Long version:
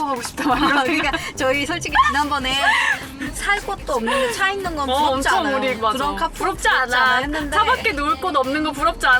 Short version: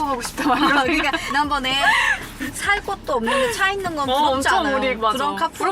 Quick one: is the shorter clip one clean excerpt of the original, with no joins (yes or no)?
no